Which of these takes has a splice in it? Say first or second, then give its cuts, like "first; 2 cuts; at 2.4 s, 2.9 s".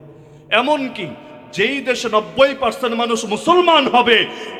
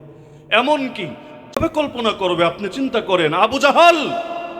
second; 1 cut; at 1.6 s